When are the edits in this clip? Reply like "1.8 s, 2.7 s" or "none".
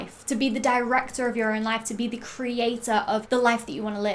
3.2 s